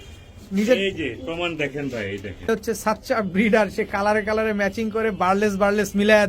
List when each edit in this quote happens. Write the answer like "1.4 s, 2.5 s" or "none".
2.5 s